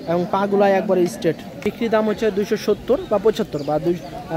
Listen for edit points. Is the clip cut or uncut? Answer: cut